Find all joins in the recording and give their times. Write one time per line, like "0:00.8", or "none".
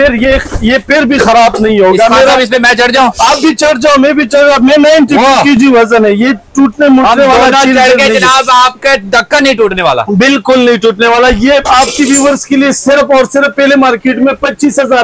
none